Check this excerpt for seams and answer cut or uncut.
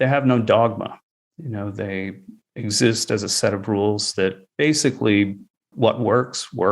cut